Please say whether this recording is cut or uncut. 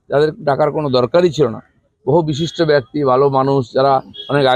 uncut